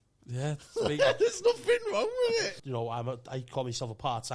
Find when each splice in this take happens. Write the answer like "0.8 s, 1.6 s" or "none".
2.5 s